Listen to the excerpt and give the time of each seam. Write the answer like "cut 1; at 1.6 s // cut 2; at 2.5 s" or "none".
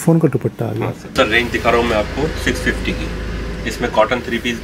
cut 1; at 1.1 s